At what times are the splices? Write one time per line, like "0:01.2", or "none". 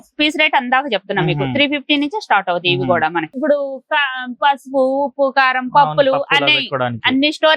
0:03.3